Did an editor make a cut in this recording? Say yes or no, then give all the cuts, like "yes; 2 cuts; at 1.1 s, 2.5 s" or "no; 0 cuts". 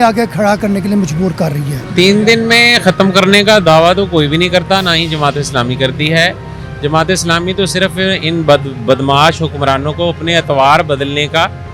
no; 0 cuts